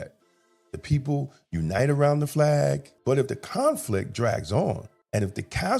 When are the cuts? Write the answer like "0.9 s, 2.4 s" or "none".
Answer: 2.9 s, 4.9 s